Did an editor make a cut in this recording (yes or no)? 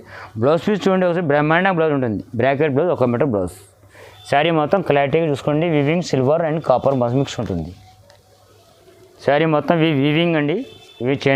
no